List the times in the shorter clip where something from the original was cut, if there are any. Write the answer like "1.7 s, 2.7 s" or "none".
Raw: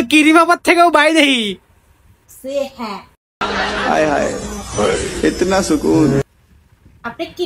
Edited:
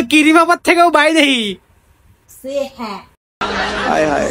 none